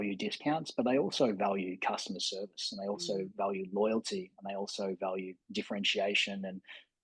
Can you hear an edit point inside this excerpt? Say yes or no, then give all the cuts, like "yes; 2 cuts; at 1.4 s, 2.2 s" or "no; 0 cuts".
no; 0 cuts